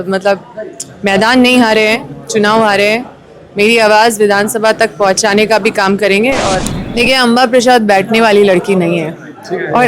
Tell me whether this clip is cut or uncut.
cut